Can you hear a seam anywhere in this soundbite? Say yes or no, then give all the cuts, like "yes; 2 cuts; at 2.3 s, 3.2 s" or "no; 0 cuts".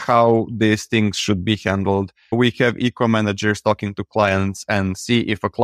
yes; 1 cut; at 2.3 s